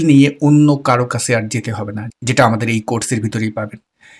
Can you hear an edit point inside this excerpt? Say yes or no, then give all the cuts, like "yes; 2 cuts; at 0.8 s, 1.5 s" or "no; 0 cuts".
no; 0 cuts